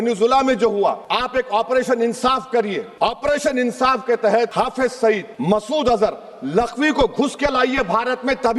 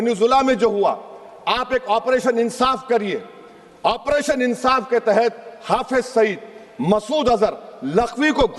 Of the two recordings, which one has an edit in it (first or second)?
first